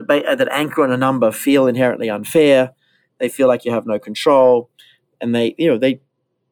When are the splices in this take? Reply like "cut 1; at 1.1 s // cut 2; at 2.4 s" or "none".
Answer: none